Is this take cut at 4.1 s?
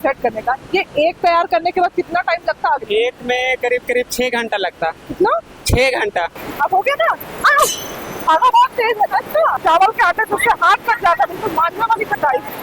no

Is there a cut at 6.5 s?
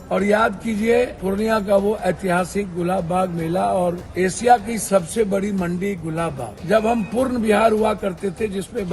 yes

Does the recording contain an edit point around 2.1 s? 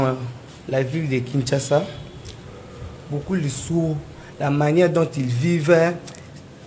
no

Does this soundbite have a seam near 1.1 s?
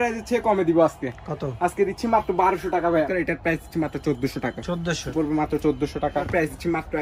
no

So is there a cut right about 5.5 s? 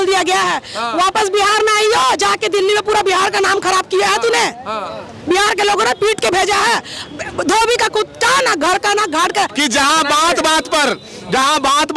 no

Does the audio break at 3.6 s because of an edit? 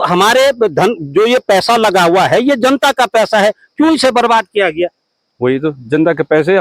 no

